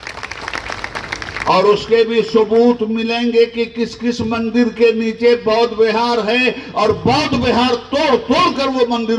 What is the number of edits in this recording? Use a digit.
0